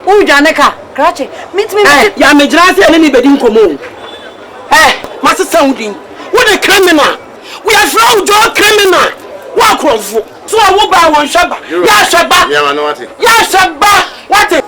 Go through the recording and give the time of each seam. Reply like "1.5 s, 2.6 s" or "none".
5.1 s